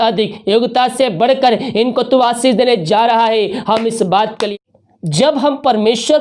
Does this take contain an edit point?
yes; 1 cut; at 4.5 s

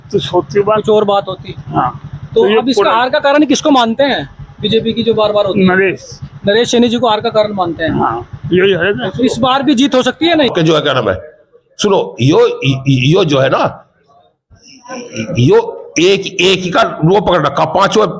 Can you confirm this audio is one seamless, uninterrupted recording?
no; 1 cut; at 10.5 s

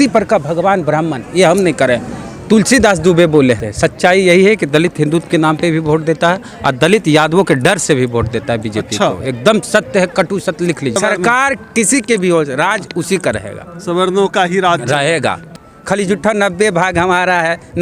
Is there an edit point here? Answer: yes; 3 cuts; at 3.7 s, 11.0 s, 15.4 s

